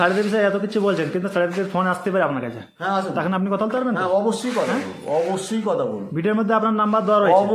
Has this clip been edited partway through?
no; 0 cuts

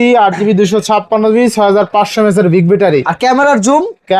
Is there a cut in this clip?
no; 0 cuts

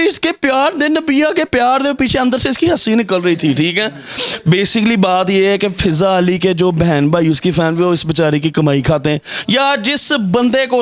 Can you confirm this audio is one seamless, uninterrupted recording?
yes; 0 cuts

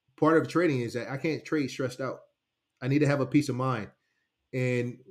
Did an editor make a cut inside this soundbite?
no; 0 cuts

